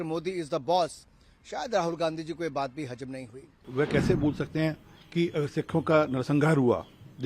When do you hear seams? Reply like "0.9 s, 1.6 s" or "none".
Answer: 3.7 s